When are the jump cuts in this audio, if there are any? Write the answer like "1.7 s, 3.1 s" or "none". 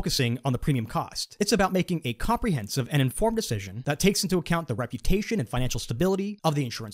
3.7 s